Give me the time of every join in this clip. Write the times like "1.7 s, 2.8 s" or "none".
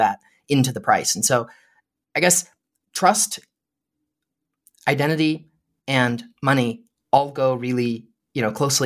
none